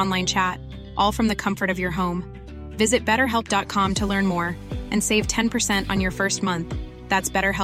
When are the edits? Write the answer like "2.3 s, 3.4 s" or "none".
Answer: none